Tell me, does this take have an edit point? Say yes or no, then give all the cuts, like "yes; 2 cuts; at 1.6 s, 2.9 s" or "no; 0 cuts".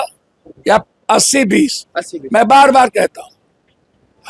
no; 0 cuts